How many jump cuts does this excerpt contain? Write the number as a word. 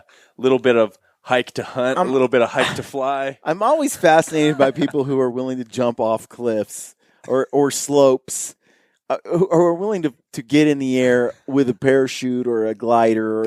zero